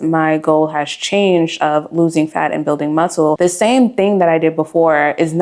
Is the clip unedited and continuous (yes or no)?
yes